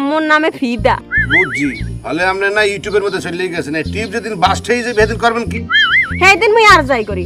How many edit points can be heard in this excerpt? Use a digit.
1